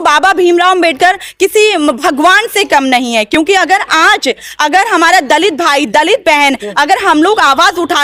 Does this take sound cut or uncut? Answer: uncut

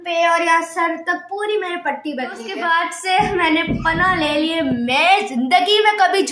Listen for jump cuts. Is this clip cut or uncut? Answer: cut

